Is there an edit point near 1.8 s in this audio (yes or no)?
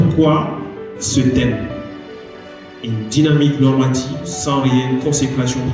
no